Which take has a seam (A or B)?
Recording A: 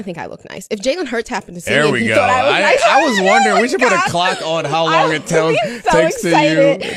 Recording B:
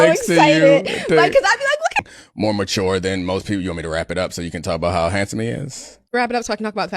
B